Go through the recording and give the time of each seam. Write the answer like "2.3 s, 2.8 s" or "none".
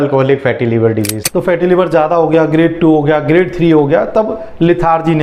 1.2 s